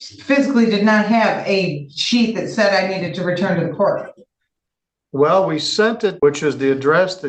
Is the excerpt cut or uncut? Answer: uncut